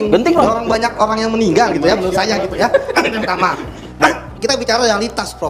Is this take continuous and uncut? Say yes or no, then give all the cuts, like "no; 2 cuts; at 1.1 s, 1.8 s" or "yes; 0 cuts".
no; 1 cut; at 4.0 s